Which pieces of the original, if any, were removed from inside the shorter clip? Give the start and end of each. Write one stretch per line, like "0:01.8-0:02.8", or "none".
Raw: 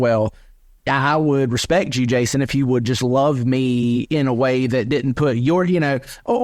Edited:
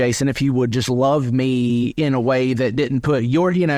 none